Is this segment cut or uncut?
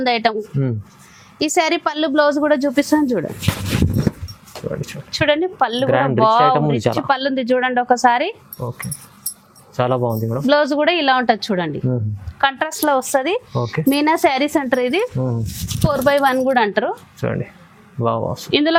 uncut